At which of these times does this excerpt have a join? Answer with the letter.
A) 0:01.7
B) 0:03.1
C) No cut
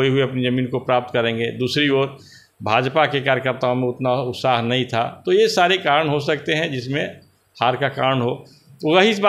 C